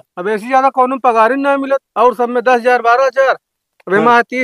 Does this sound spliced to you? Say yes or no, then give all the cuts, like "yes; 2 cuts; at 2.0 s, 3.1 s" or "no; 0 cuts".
no; 0 cuts